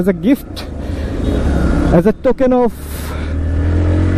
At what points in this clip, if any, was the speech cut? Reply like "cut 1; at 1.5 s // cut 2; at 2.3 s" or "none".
none